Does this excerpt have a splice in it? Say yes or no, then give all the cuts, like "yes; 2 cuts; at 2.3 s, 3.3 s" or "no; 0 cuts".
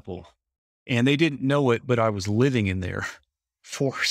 no; 0 cuts